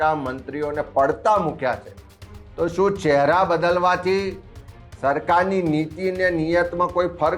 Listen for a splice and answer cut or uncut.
uncut